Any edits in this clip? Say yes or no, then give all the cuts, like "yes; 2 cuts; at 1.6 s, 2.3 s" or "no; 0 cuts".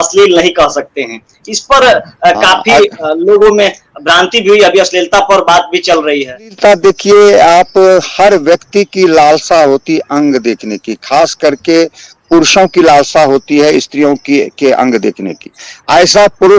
yes; 1 cut; at 6.6 s